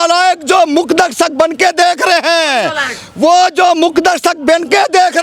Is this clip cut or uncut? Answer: uncut